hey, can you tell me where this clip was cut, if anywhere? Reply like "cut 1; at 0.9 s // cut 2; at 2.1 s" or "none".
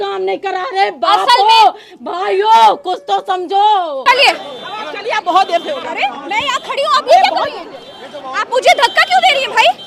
cut 1; at 4.0 s